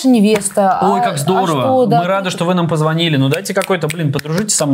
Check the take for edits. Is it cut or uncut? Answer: uncut